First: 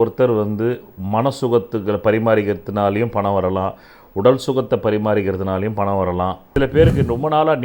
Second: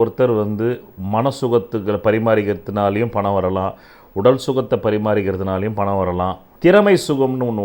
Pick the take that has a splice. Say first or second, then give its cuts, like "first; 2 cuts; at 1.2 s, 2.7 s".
first; 1 cut; at 6.4 s